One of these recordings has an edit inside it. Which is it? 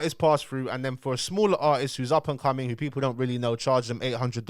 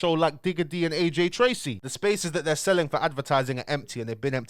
second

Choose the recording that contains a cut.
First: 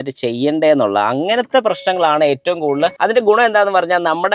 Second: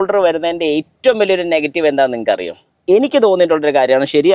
first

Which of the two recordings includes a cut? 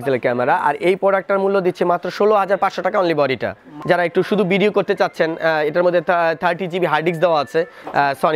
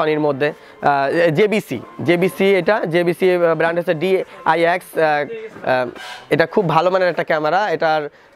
first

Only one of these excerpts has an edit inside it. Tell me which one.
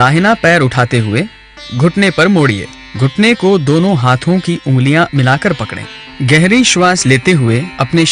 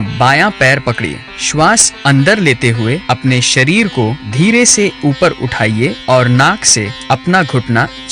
second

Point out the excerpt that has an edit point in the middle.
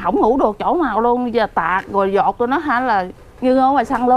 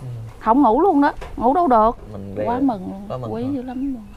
second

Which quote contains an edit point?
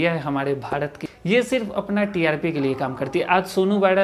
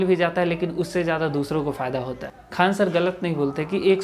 second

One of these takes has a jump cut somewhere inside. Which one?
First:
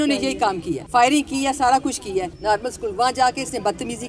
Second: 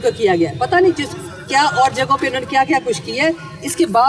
first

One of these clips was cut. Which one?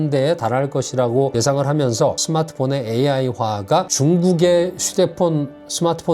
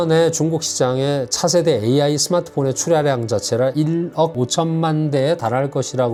first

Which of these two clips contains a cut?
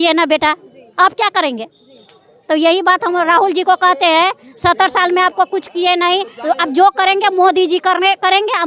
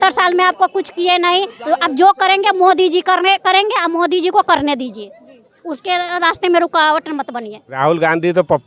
second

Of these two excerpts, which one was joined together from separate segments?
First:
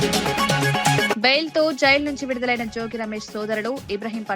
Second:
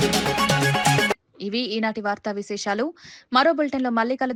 first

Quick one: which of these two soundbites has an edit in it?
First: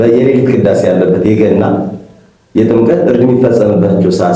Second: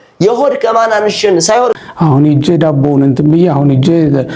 second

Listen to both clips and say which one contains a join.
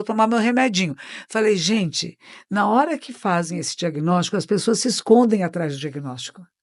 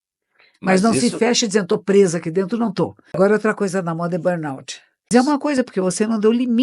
second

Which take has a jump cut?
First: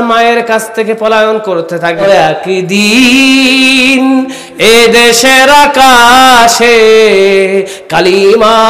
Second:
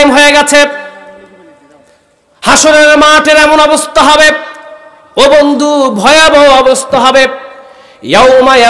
first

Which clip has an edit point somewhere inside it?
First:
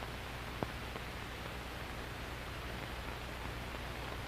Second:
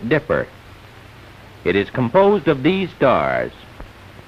first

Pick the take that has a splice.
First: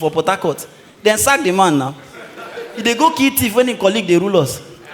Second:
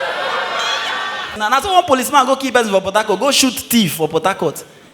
second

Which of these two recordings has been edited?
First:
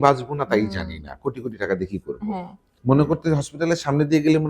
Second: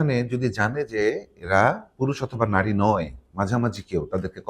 first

